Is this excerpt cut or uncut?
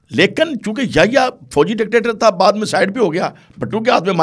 uncut